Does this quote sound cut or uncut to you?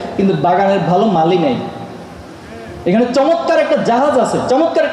uncut